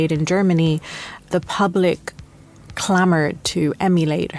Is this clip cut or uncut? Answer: cut